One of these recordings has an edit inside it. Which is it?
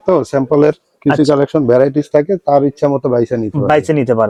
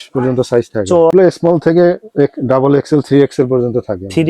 second; 1 cut; at 1.1 s

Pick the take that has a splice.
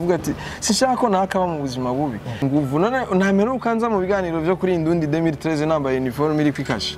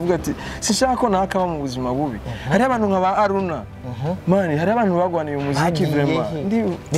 first; 1 cut; at 2.4 s

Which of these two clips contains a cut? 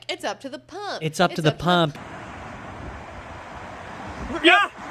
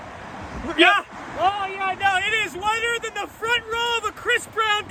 first; 1 cut; at 1.9 s

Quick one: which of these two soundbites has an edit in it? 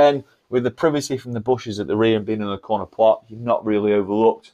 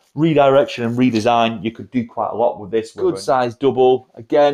second; 1 cut; at 3.0 s

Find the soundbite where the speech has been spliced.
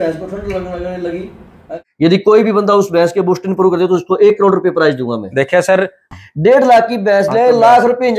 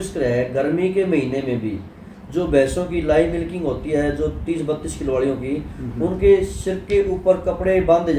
first; 2 cuts; at 1.6 s, 6.0 s

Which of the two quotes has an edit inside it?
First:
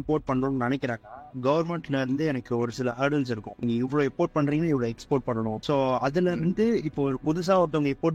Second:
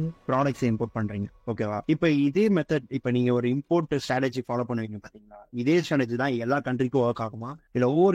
first; 2 cuts; at 3.6 s, 5.6 s

